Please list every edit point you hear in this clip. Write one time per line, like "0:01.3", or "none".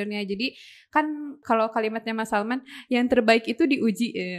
0:01.4